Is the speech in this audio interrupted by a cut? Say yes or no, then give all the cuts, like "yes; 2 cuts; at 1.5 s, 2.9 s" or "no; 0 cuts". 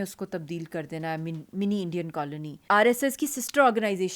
yes; 1 cut; at 2.6 s